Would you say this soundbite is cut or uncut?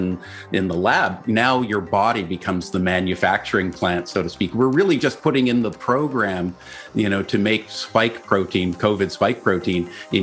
uncut